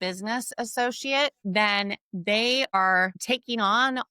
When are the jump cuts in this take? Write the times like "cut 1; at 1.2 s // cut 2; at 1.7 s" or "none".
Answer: cut 1; at 1.4 s // cut 2; at 2.8 s